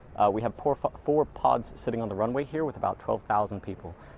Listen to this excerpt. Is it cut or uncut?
uncut